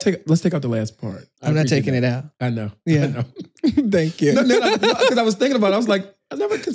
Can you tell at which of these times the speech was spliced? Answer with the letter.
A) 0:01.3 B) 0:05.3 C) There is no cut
A